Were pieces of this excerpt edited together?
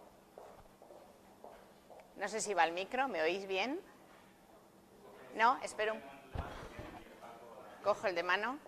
yes; 1 cut; at 2.3 s

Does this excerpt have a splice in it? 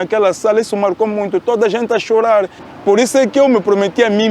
yes; 1 cut; at 2.6 s

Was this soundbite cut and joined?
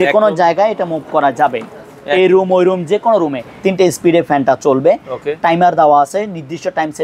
yes; 1 cut; at 3.5 s

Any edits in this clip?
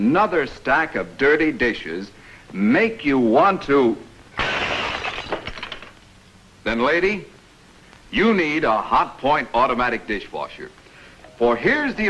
yes; 1 cut; at 2.1 s

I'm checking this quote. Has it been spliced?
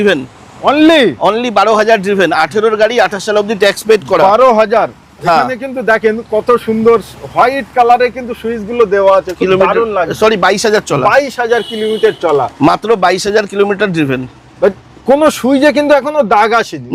no; 0 cuts

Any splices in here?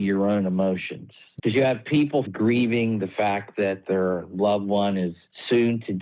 yes; 1 cut; at 2.3 s

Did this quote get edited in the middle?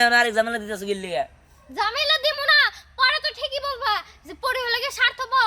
no; 0 cuts

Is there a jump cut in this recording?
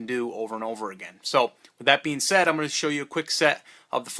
yes; 1 cut; at 2.6 s

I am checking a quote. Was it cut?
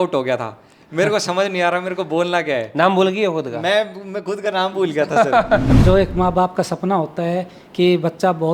yes; 1 cut; at 5.8 s

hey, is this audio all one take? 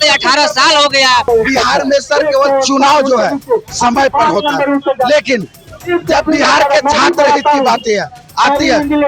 no; 1 cut; at 1.2 s

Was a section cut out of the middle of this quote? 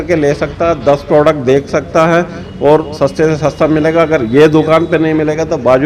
no; 0 cuts

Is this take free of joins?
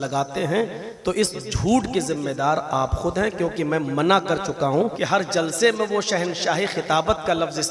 no; 1 cut; at 4.9 s

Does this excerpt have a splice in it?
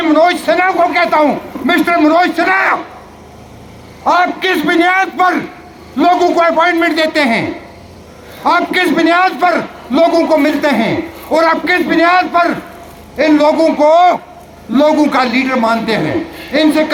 no; 0 cuts

